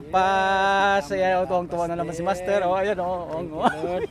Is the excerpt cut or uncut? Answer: uncut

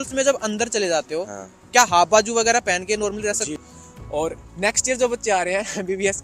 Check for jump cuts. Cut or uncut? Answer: cut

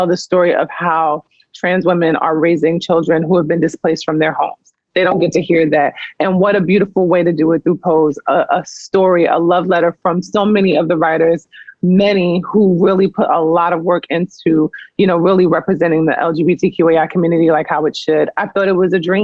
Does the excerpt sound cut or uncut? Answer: uncut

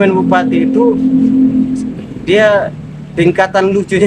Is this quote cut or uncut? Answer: uncut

